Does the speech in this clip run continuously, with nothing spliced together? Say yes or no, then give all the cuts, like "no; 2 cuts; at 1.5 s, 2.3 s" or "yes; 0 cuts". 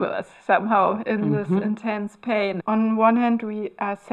no; 1 cut; at 2.6 s